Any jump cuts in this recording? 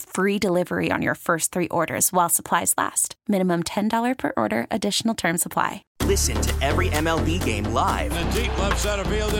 yes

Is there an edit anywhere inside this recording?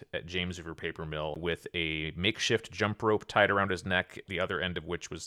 yes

